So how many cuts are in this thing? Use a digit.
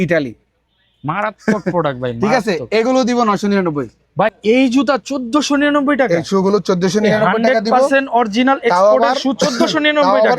1